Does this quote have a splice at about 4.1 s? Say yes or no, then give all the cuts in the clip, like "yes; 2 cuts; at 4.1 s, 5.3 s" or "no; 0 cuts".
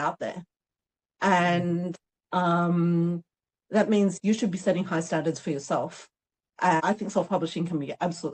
no; 1 cut; at 6.8 s